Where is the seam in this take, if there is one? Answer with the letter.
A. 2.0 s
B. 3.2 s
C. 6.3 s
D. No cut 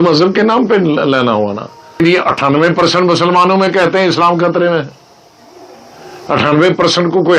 A